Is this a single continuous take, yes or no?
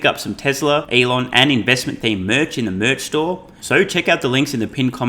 no